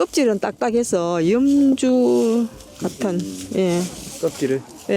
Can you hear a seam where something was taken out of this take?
no; 0 cuts

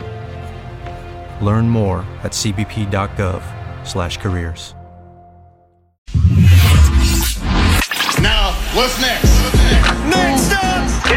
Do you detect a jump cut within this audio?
yes; 1 cut; at 6.1 s

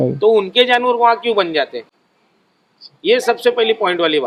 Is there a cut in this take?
no; 0 cuts

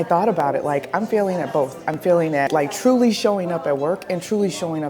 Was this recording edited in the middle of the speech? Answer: yes; 1 cut; at 2.5 s

